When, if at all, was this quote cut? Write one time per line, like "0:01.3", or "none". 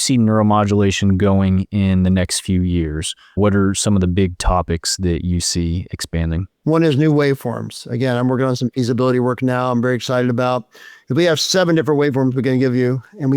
0:06.5